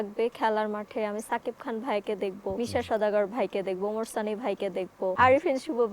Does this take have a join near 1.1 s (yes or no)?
no